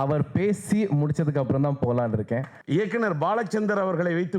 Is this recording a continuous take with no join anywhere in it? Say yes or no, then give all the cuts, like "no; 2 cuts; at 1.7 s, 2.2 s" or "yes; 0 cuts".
no; 1 cut; at 2.5 s